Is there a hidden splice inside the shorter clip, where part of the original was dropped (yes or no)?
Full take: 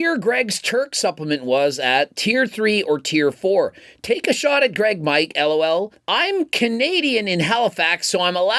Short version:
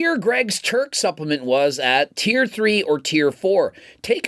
no